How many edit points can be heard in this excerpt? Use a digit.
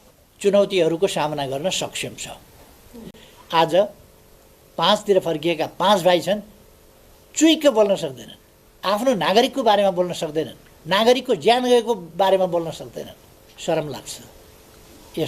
1